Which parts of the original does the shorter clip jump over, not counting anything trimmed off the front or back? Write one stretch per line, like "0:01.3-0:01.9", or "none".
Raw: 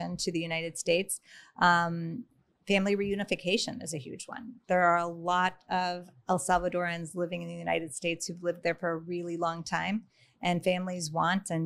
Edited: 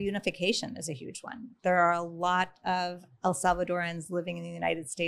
none